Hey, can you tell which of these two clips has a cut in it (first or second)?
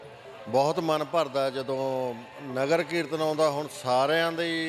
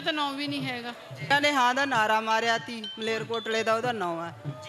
second